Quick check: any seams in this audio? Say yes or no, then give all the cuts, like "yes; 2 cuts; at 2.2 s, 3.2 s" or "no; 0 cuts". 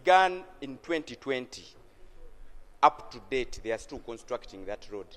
no; 0 cuts